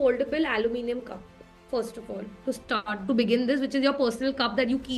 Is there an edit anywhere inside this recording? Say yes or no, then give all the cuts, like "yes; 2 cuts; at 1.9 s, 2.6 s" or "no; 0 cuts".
no; 0 cuts